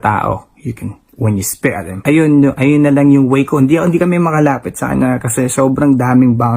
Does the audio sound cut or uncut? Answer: cut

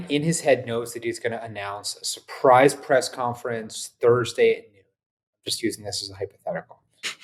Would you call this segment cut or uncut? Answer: uncut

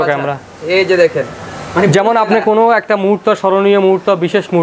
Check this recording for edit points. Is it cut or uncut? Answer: uncut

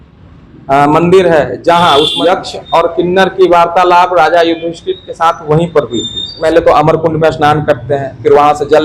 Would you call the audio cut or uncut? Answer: cut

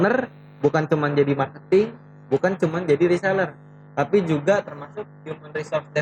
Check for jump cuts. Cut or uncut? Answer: uncut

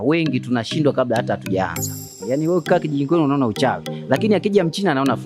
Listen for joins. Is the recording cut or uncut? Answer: cut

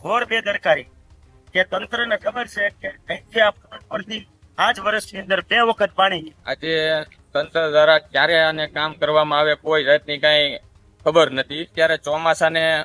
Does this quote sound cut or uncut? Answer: cut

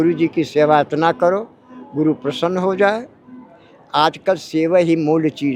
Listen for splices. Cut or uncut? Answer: uncut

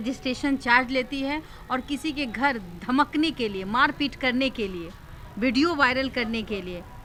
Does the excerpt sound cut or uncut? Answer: uncut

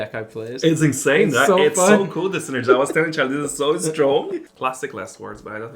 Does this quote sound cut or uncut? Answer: cut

